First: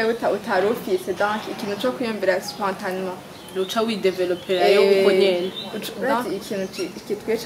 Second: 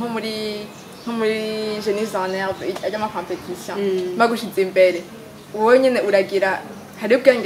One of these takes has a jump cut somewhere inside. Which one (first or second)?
first